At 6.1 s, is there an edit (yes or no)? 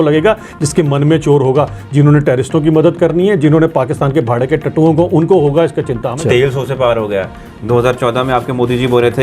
yes